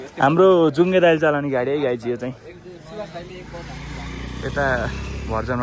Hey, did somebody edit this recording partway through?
no; 0 cuts

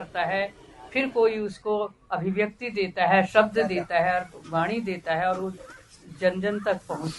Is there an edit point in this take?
no; 0 cuts

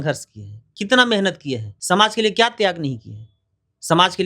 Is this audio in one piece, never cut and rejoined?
no; 1 cut; at 1.7 s

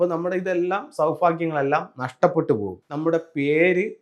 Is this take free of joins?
no; 1 cut; at 2.7 s

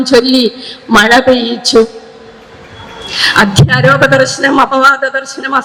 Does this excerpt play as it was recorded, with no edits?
yes; 0 cuts

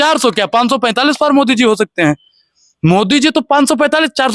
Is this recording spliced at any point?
no; 0 cuts

